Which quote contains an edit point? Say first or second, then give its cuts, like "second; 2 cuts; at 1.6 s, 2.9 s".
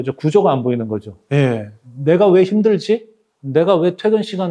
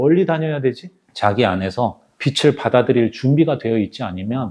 second; 1 cut; at 1.1 s